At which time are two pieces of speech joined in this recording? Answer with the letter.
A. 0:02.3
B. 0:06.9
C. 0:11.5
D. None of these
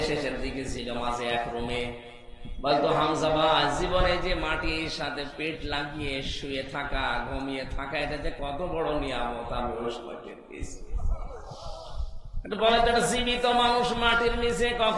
D